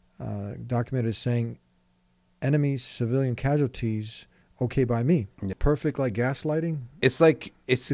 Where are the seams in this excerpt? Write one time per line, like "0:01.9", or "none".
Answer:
0:05.6